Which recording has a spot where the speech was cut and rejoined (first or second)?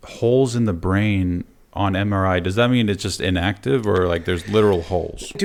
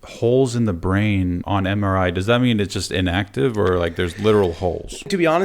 second